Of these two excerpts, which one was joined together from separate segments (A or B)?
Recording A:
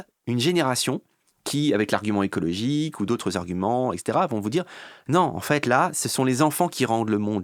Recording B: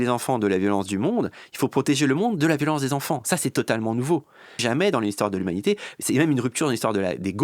B